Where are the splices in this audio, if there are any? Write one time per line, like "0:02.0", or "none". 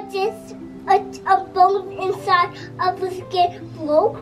none

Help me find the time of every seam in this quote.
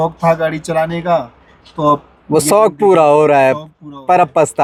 none

